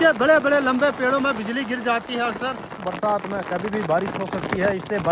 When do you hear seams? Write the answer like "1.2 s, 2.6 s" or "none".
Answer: 2.8 s